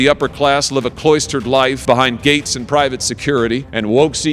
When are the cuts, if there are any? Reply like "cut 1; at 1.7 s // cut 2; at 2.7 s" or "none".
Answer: none